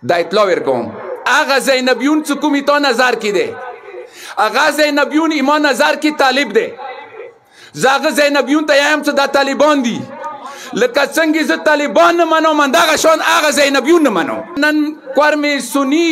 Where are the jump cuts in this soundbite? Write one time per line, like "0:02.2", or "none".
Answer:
0:01.2
0:14.6